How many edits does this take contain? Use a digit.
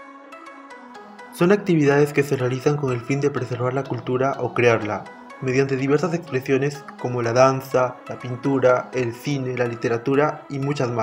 1